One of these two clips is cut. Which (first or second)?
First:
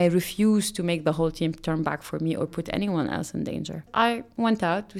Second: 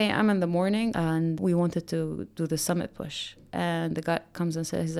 first